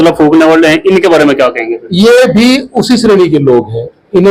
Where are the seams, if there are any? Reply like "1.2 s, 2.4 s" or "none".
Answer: none